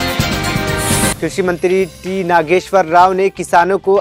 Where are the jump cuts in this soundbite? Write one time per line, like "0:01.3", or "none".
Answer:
0:01.1

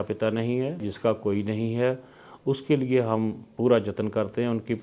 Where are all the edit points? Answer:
0:00.9

